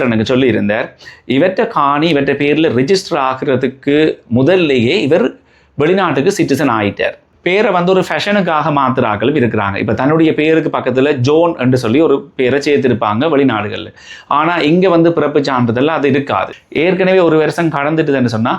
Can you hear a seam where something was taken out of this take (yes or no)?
yes